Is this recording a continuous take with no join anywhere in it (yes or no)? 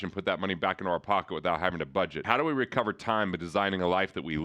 no